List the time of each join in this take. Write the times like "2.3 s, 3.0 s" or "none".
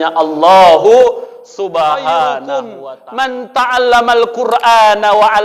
2.5 s